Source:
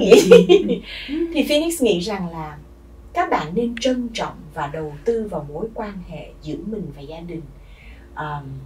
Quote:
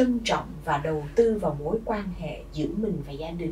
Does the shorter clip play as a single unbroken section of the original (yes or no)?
yes